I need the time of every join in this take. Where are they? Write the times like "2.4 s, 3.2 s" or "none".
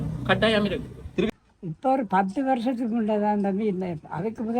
1.3 s